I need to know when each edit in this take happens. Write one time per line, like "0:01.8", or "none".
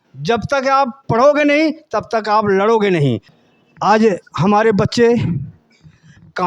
0:03.3